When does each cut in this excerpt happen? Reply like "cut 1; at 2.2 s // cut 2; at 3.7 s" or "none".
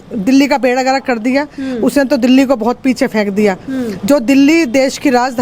none